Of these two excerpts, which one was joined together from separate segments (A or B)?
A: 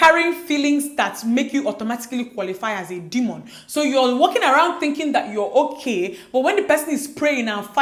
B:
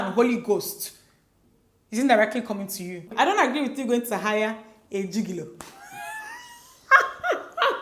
B